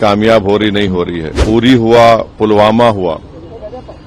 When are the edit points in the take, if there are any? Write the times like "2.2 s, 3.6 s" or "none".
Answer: 1.3 s

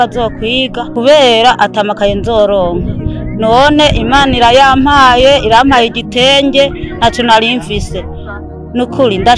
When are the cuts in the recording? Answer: none

